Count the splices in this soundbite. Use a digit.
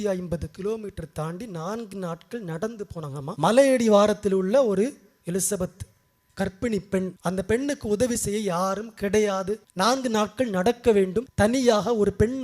4